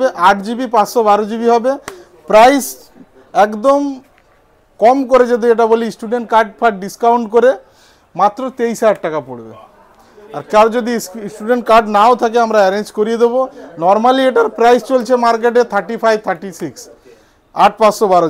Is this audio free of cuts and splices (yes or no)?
yes